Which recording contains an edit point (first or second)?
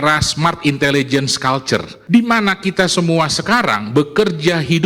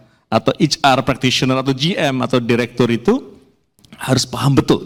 first